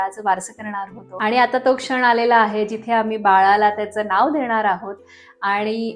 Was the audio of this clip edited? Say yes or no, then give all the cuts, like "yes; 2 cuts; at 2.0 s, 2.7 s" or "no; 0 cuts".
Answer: yes; 1 cut; at 1.1 s